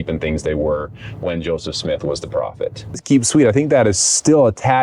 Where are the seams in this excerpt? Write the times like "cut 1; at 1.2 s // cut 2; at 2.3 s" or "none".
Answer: cut 1; at 3.0 s